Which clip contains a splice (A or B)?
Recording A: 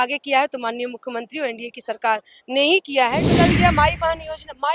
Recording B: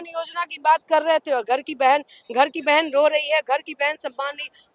A